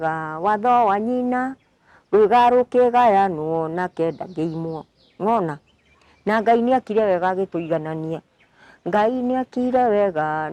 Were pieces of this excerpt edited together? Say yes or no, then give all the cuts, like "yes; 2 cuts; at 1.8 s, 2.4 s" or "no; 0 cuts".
no; 0 cuts